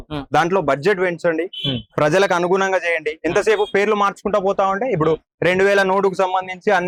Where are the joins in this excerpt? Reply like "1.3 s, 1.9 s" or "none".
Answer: none